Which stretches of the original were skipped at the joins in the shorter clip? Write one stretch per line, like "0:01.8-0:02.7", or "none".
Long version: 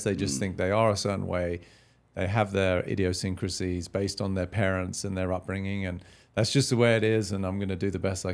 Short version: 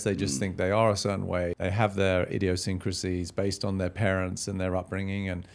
0:01.6-0:02.1